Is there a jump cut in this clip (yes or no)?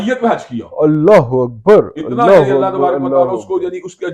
no